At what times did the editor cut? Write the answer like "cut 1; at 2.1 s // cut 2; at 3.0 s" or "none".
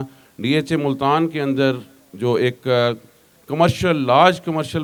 none